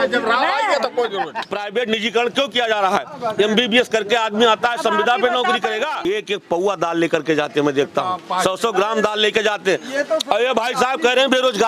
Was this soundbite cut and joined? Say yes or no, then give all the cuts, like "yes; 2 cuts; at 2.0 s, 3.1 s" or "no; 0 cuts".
yes; 2 cuts; at 1.4 s, 6.1 s